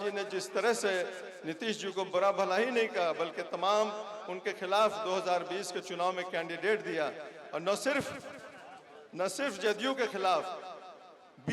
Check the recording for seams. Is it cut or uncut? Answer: uncut